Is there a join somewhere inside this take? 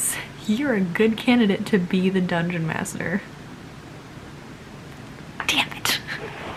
no; 0 cuts

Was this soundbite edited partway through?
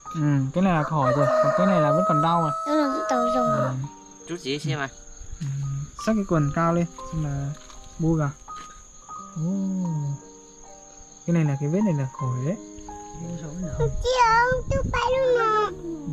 no; 0 cuts

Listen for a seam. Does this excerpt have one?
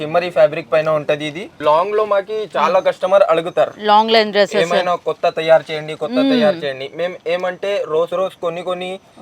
yes; 1 cut; at 1.5 s

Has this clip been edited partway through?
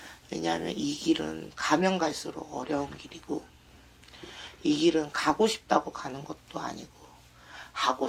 no; 0 cuts

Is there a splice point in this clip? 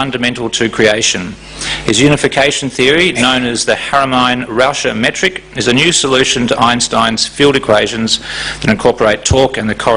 yes; 1 cut; at 3.4 s

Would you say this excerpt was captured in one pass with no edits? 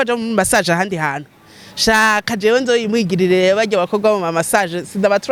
yes; 0 cuts

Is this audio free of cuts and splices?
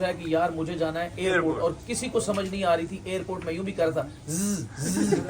yes; 0 cuts

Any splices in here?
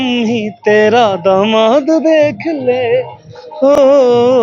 no; 0 cuts

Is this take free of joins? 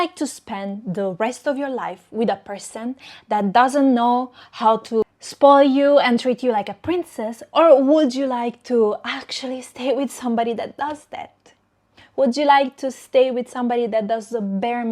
no; 1 cut; at 5.0 s

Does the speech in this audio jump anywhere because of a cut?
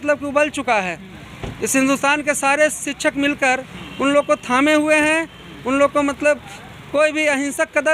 no; 0 cuts

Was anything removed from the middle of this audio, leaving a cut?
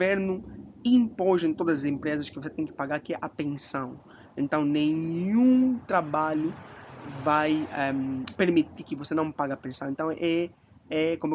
no; 0 cuts

